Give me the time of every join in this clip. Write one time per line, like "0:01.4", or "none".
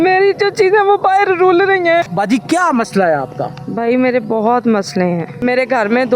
0:02.1
0:05.4